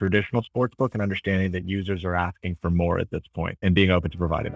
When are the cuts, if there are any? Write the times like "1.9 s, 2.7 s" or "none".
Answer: 3.6 s